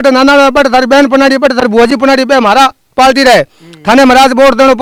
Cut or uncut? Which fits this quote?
uncut